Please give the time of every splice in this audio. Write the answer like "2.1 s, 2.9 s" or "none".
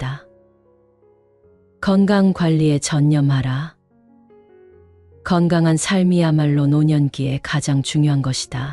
3.9 s, 5.2 s